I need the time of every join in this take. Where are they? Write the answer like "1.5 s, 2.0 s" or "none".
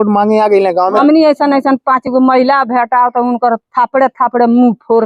1.0 s